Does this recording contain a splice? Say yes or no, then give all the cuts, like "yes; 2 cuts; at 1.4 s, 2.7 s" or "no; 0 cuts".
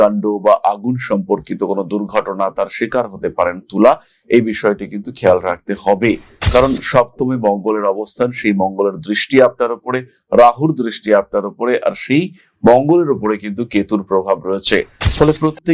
no; 0 cuts